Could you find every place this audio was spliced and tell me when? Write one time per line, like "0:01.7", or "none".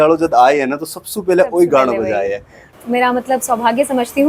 0:02.8